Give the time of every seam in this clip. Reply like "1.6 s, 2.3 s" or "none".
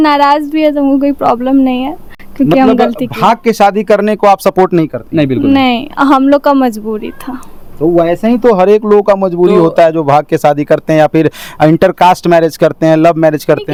none